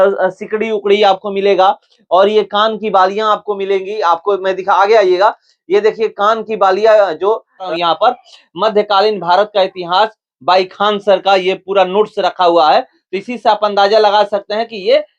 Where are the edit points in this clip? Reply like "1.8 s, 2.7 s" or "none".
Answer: 7.7 s